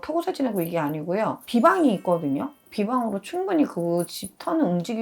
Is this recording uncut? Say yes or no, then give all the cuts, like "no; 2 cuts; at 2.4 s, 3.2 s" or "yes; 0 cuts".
yes; 0 cuts